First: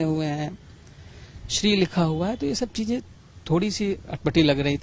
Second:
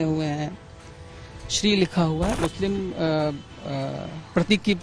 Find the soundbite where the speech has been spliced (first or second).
second